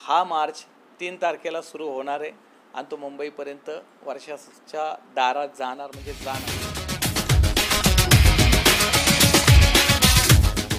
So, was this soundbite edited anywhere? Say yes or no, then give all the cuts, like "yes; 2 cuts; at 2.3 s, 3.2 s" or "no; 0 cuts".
yes; 1 cut; at 6.4 s